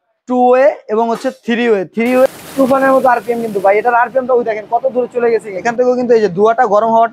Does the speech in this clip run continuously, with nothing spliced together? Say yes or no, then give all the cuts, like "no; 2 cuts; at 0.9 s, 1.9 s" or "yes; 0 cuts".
no; 2 cuts; at 2.3 s, 5.5 s